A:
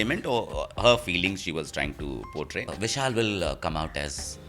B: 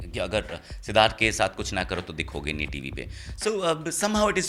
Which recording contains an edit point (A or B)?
A